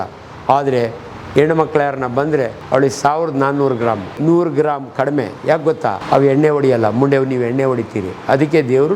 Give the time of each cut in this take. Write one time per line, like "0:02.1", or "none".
0:02.6
0:04.2
0:06.0